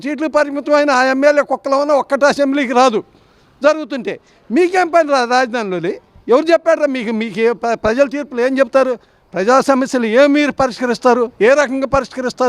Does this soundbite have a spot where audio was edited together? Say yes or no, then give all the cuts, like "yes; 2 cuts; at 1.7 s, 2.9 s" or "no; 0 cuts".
no; 0 cuts